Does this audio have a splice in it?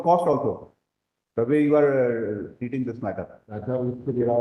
yes; 1 cut; at 3.4 s

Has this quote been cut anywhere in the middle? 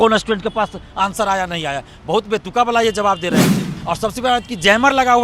yes; 1 cut; at 3.7 s

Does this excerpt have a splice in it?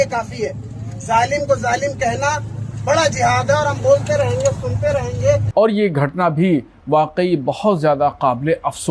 yes; 1 cut; at 5.5 s

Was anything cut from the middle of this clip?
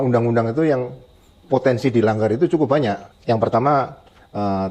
no; 0 cuts

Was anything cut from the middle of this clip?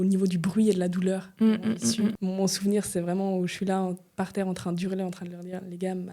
yes; 1 cut; at 2.1 s

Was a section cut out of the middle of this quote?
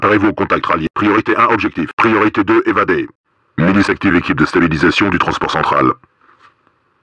yes; 2 cuts; at 0.9 s, 1.9 s

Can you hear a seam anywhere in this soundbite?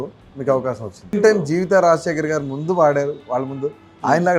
yes; 1 cut; at 1.2 s

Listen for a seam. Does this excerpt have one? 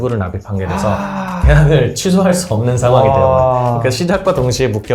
no; 0 cuts

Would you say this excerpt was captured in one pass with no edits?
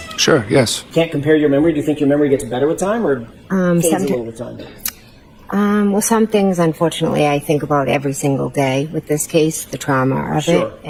yes; 0 cuts

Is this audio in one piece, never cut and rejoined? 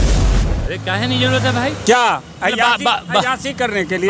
yes; 0 cuts

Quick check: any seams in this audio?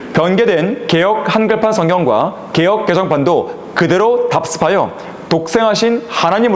no; 0 cuts

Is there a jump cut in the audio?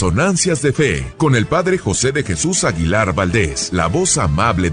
yes; 2 cuts; at 1.0 s, 3.6 s

